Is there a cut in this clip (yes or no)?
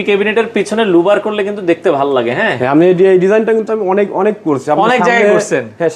no